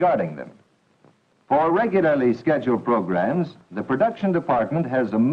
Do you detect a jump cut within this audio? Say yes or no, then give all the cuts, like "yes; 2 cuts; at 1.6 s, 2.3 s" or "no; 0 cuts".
yes; 1 cut; at 2.5 s